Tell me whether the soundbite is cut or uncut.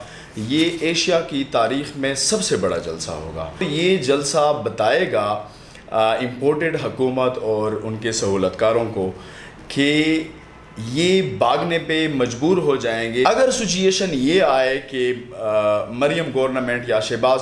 cut